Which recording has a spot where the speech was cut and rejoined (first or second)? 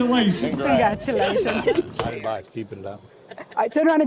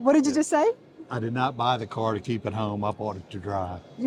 first